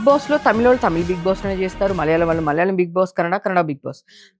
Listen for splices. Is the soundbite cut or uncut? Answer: uncut